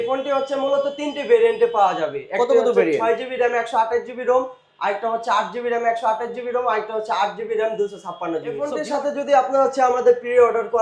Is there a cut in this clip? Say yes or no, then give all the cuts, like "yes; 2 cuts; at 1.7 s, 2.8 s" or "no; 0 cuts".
yes; 1 cut; at 8.7 s